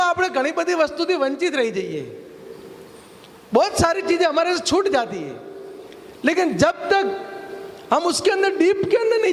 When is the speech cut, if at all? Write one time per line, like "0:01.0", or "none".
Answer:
none